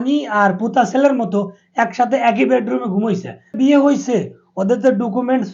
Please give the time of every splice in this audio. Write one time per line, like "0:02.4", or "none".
0:03.6